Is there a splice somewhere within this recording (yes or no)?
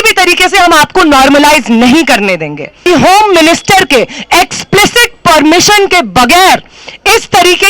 yes